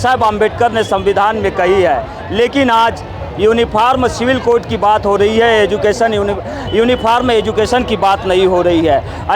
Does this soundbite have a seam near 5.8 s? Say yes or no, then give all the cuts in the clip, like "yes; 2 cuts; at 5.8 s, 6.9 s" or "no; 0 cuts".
no; 0 cuts